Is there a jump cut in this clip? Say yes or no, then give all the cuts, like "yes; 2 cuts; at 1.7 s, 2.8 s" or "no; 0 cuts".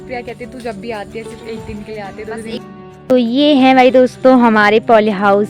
yes; 1 cut; at 2.6 s